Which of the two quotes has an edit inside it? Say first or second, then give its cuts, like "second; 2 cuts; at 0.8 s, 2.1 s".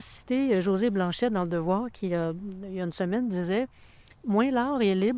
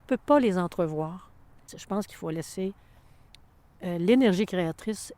second; 1 cut; at 1.8 s